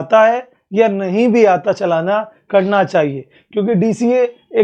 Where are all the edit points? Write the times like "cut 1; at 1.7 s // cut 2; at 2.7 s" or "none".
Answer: none